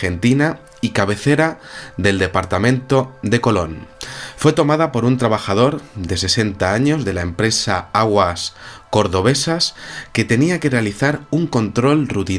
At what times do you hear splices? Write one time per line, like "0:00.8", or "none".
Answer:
0:08.8

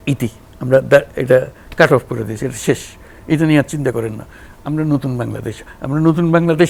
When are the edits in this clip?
none

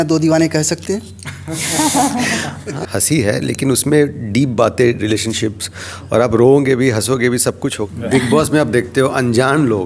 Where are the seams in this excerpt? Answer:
0:02.7
0:07.8

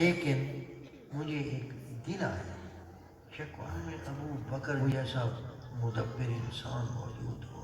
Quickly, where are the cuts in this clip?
0:03.8

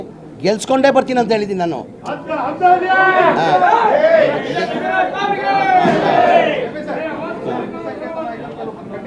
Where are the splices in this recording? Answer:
none

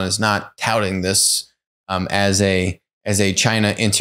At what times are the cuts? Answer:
none

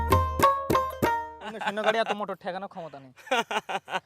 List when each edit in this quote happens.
0:01.6

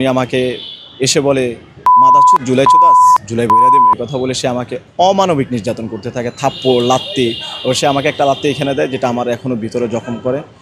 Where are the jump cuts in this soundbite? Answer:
none

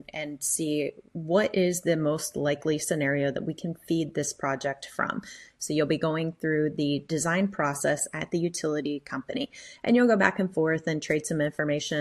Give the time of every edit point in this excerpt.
0:01.1

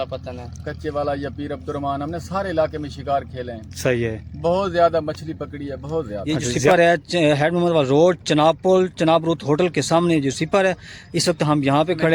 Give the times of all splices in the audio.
0:06.7

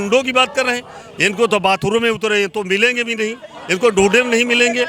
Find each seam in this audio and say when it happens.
none

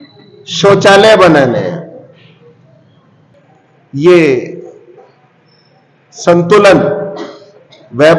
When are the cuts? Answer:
0:03.3

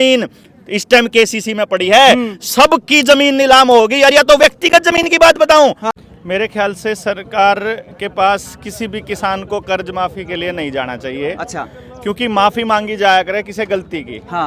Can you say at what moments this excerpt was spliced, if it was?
0:05.9

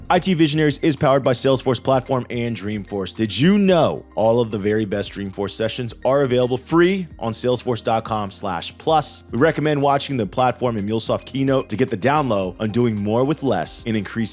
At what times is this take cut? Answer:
none

